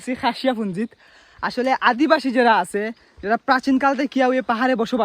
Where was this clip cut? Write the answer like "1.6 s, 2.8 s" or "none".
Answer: none